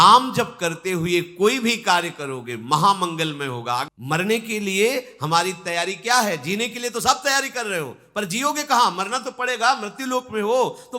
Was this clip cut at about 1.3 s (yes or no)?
no